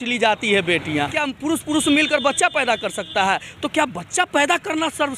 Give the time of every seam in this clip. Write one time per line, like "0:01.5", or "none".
0:01.2